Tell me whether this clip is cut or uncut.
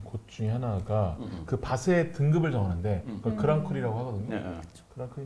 uncut